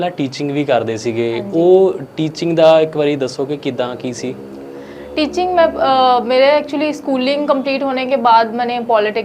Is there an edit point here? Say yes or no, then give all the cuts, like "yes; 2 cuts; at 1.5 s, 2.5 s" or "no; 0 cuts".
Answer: no; 0 cuts